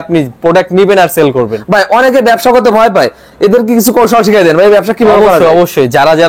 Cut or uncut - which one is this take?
uncut